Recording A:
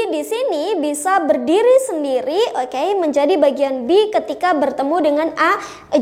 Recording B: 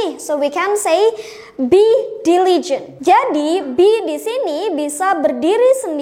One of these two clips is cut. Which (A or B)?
B